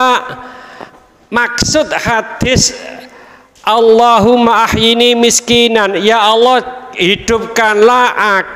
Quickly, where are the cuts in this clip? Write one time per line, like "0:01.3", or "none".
0:06.9